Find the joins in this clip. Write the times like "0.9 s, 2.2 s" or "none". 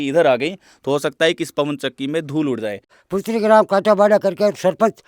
2.9 s